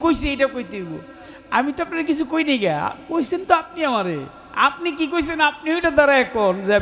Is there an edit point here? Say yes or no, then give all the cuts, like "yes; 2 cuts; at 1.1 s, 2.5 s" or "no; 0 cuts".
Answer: no; 0 cuts